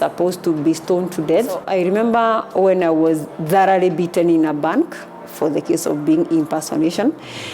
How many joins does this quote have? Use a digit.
1